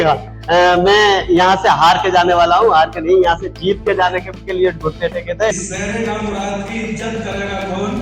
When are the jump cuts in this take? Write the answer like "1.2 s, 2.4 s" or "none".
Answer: 5.5 s